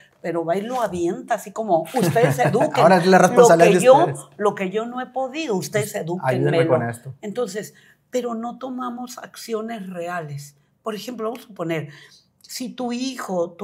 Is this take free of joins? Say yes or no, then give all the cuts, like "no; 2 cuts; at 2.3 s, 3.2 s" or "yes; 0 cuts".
yes; 0 cuts